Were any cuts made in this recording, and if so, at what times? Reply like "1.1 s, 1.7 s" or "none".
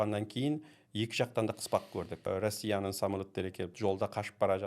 2.2 s, 3.7 s